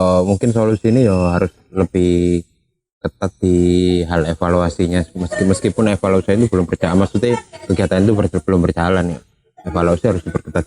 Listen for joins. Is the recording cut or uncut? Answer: uncut